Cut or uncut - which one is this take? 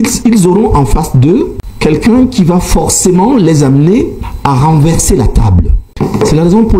cut